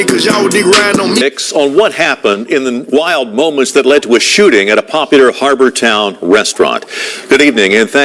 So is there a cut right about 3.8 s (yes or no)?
no